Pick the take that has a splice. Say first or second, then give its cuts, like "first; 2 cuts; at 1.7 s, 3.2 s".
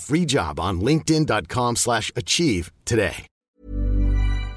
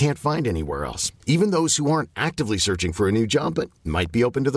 first; 1 cut; at 3.3 s